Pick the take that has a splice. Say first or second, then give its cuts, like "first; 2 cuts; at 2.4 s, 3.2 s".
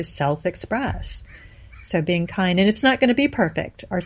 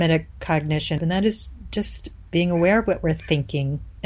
second; 1 cut; at 1.0 s